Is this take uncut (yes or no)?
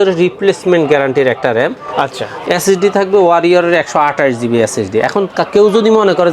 yes